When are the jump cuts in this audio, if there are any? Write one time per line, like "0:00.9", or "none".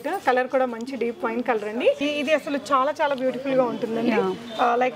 0:02.0